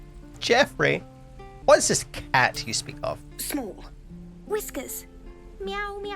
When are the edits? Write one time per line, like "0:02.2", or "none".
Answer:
0:01.5